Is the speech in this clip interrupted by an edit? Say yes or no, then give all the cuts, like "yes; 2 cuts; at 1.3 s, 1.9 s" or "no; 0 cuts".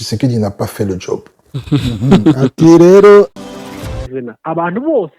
yes; 1 cut; at 3.5 s